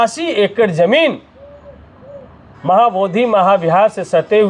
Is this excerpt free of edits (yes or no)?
yes